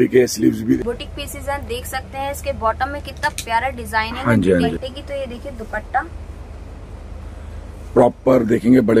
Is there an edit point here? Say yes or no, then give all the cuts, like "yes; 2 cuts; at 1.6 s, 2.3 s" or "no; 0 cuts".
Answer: yes; 2 cuts; at 0.8 s, 4.7 s